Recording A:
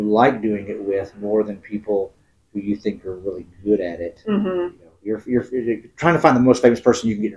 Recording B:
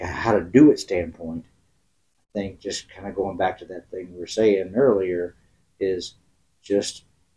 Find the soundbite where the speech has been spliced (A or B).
A